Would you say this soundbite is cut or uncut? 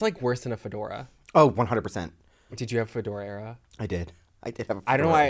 cut